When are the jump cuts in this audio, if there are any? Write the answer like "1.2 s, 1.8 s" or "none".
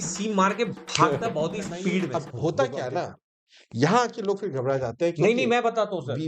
2.2 s